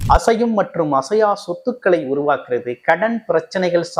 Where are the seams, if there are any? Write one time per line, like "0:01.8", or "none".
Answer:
none